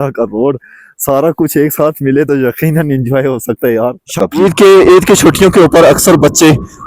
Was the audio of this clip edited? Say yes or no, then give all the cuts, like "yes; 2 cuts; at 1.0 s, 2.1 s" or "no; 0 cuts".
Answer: yes; 1 cut; at 4.2 s